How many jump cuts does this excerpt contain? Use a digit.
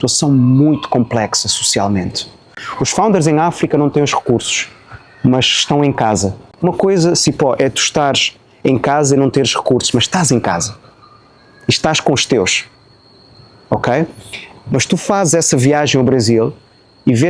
1